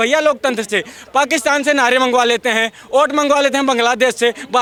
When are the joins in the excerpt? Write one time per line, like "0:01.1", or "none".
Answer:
none